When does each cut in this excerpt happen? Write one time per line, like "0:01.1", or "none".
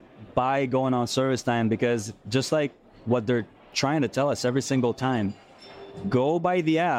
none

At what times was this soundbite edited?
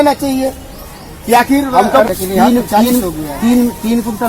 0:02.1

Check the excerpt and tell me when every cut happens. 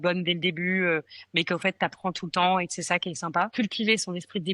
0:03.5

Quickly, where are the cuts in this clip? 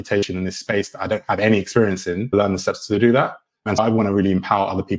0:03.8

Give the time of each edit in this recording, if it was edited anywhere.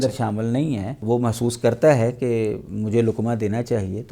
0:01.0

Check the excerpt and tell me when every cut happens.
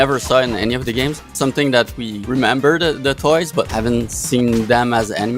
0:01.3
0:02.1
0:03.7

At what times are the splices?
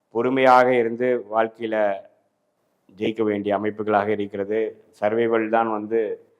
none

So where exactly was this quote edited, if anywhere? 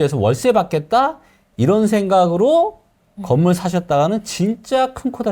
none

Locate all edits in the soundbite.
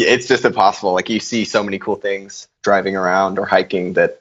0:02.5

